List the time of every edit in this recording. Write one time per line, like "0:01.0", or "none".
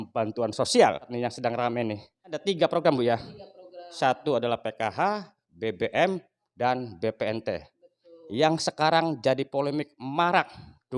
0:01.1
0:02.4